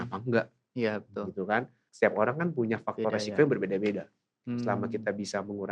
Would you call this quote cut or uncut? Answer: cut